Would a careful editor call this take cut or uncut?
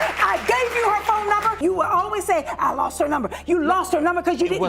cut